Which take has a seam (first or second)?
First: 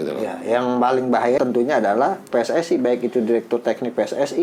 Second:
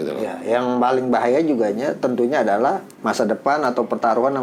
first